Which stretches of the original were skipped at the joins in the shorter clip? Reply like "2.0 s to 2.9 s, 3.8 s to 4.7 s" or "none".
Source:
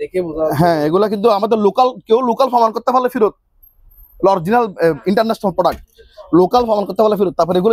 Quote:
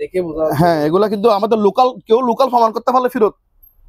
none